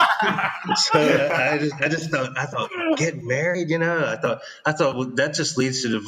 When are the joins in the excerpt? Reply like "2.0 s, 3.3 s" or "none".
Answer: none